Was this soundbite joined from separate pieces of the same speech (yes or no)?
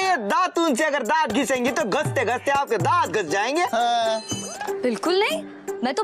no